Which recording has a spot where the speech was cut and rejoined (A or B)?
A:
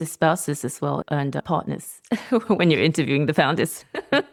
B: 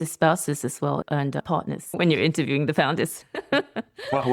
B